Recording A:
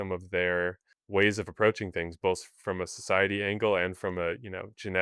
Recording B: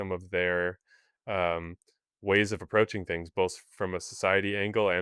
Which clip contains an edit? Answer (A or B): A